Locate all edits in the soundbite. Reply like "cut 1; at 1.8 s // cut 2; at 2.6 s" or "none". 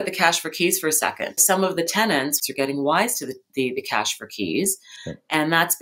cut 1; at 1.4 s // cut 2; at 2.4 s